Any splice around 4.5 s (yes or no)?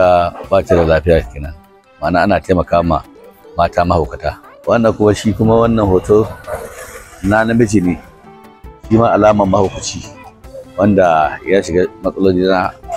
yes